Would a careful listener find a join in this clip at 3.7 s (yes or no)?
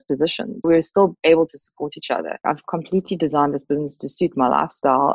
no